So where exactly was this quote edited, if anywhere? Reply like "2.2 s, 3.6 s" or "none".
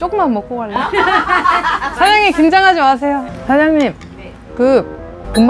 3.3 s

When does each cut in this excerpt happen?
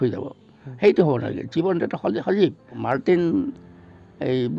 2.8 s

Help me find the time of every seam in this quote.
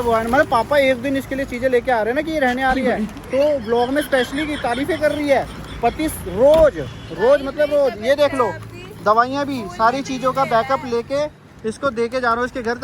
none

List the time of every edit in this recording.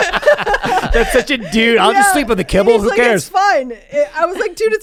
none

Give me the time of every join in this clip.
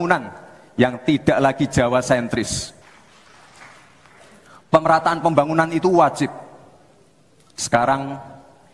2.8 s

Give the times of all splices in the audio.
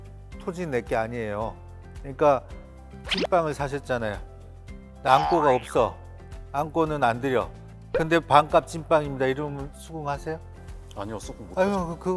none

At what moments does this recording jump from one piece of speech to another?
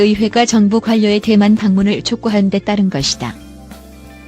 3.3 s

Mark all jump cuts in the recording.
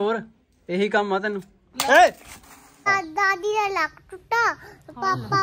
2.9 s

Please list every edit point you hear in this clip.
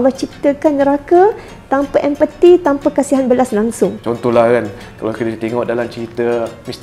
4.0 s

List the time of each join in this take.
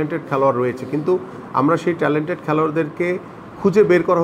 none

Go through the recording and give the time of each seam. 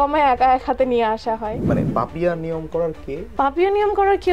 1.6 s, 3.2 s

